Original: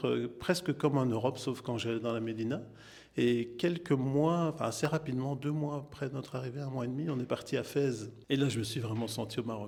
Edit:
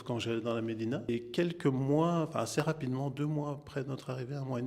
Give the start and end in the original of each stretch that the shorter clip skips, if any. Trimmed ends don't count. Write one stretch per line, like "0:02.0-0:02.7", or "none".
0:02.7-0:03.3